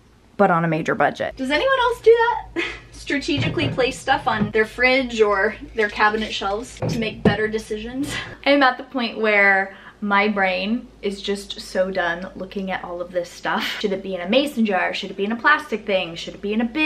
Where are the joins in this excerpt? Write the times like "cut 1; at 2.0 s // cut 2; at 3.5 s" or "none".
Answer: cut 1; at 1.3 s // cut 2; at 4.5 s // cut 3; at 6.8 s // cut 4; at 8.2 s // cut 5; at 13.7 s